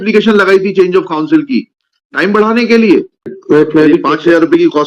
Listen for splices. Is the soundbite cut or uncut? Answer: cut